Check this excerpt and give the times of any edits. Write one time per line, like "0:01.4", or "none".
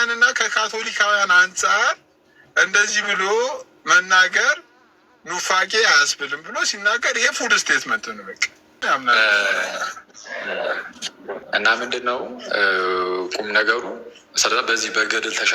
0:08.7

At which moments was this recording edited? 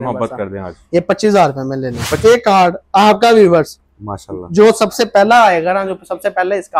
0:02.2

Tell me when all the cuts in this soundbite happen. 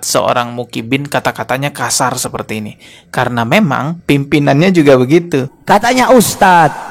0:05.5

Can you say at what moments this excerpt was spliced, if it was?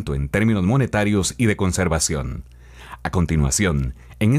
0:01.3

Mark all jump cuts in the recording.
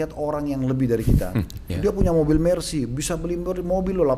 0:01.6

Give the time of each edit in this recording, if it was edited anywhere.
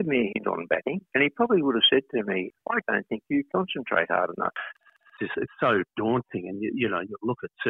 0:01.0
0:02.5
0:04.9

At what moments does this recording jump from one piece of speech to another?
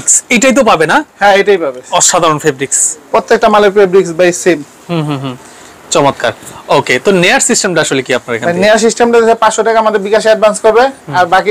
none

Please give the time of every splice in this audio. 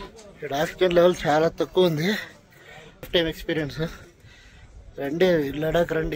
0:03.1

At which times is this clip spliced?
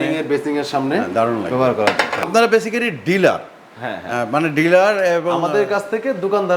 0:02.3

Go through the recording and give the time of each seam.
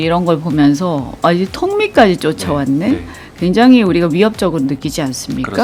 none

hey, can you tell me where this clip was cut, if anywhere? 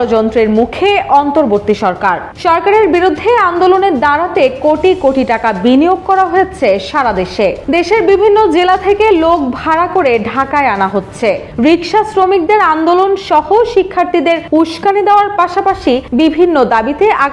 none

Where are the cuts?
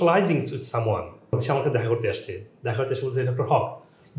0:01.4

